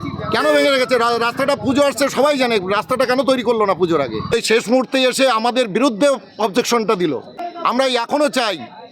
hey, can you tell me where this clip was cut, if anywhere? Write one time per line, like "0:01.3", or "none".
0:04.3
0:07.4